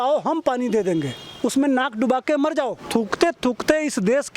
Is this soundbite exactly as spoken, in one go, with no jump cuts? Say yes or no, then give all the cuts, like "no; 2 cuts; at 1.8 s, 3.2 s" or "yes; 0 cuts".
no; 1 cut; at 2.8 s